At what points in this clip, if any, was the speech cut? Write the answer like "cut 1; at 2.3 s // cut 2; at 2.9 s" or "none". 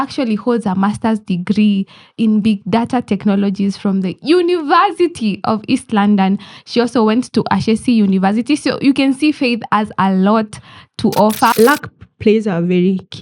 cut 1; at 11.5 s